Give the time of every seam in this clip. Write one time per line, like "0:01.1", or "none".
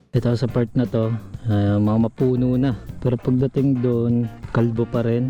0:01.3
0:02.9
0:04.4